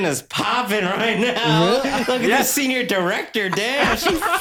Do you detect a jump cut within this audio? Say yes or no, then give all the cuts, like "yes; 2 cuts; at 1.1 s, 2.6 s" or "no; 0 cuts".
no; 0 cuts